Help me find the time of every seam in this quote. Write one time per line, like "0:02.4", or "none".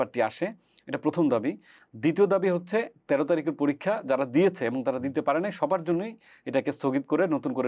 none